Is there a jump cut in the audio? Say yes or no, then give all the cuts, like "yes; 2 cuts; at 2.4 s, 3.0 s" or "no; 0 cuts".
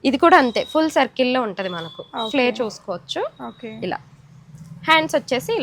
no; 0 cuts